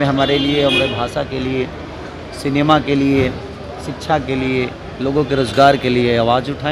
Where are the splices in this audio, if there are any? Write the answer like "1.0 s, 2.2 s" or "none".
none